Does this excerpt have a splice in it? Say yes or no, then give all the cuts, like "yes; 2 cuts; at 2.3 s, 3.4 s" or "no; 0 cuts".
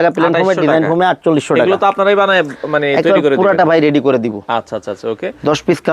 no; 0 cuts